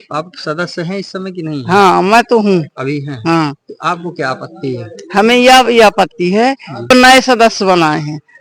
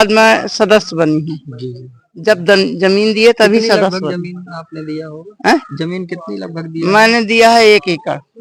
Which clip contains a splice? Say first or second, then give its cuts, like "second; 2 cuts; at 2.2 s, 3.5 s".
first; 1 cut; at 6.9 s